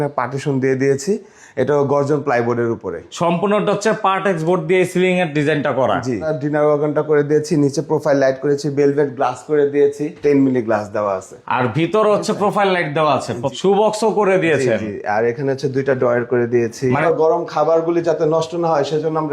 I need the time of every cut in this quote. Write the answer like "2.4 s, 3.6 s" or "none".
3.1 s, 6.3 s, 10.2 s, 13.4 s, 17.0 s